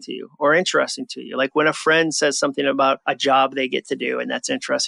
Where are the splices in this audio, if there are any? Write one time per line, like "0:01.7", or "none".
0:03.0